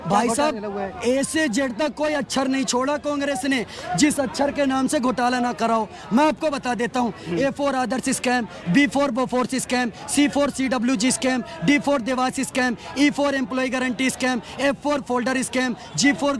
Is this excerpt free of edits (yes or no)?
yes